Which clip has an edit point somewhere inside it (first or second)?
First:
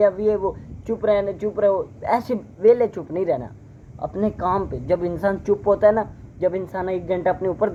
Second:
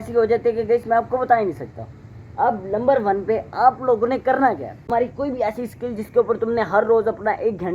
second